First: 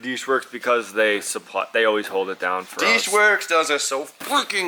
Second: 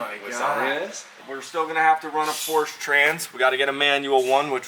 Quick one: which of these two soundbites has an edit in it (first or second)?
second